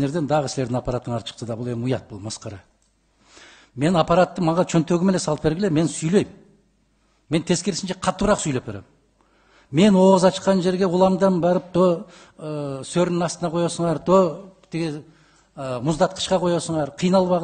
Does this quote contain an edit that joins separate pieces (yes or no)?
no